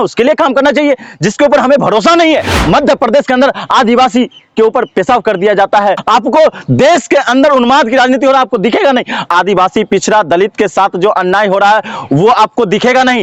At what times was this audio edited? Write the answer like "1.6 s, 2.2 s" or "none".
2.5 s, 6.0 s, 9.3 s